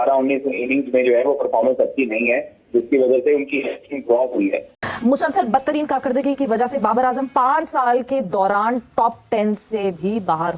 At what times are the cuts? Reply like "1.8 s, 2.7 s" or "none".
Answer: 4.9 s